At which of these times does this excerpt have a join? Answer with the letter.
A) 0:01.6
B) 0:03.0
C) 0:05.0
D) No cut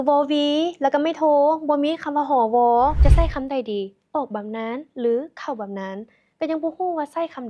B